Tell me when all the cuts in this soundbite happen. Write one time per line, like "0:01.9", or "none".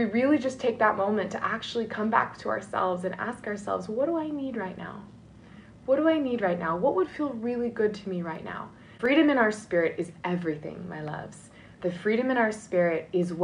0:08.9

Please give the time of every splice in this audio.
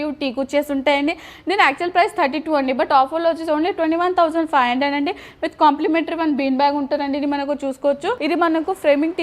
0:08.2

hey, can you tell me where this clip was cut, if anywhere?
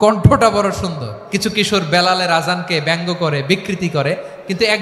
0:01.1

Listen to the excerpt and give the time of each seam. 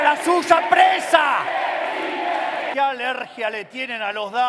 0:02.7

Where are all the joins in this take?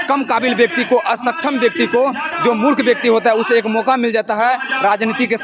none

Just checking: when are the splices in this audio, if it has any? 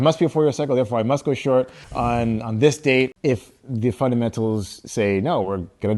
0:01.8
0:03.1

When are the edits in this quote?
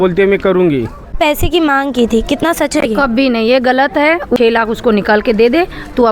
0:01.1
0:04.4

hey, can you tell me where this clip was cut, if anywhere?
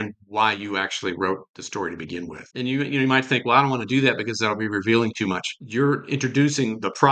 0:02.4
0:05.6

